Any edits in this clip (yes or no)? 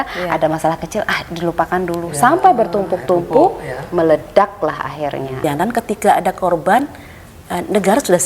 yes